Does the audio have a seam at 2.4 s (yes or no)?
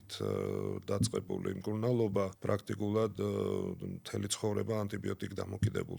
yes